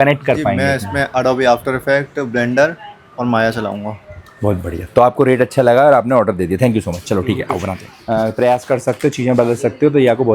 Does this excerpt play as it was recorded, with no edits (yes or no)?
no